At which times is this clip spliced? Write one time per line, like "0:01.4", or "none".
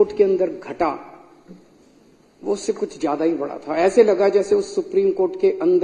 none